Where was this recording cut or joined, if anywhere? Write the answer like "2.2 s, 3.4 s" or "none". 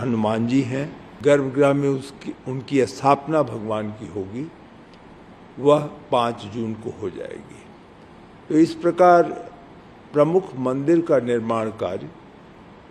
1.0 s

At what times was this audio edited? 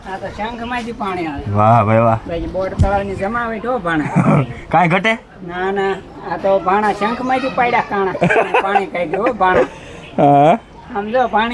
none

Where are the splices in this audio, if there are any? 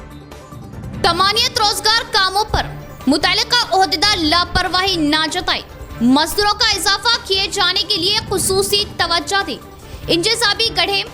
1.0 s

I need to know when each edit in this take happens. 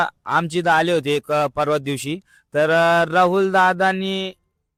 none

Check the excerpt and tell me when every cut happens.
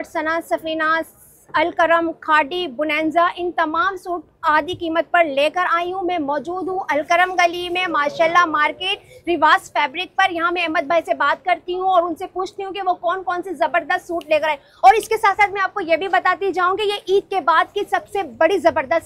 none

